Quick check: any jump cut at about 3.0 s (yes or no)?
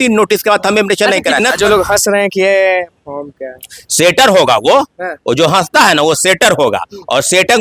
no